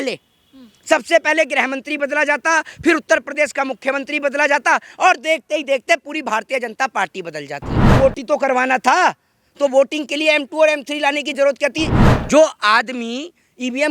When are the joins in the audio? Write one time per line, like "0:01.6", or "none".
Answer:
0:07.9
0:12.0